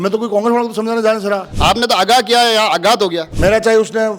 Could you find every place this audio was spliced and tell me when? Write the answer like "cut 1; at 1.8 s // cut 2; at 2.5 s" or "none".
cut 1; at 1.5 s // cut 2; at 3.3 s